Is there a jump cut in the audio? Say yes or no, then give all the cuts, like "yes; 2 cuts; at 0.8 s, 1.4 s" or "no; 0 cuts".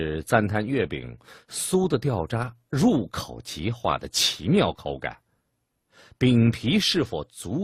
yes; 1 cut; at 6.5 s